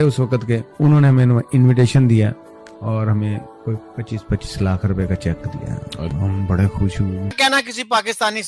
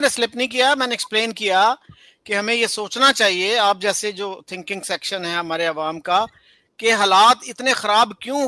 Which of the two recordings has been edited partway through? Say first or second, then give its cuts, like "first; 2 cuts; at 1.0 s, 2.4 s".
first; 1 cut; at 7.3 s